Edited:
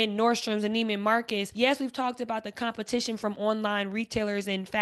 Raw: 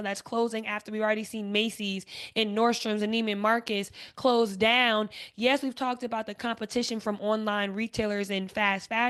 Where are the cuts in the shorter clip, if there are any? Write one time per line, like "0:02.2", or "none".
0:01.5